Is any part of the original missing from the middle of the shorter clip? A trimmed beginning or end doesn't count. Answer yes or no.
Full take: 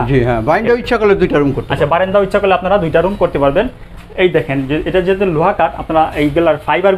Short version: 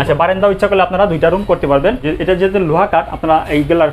yes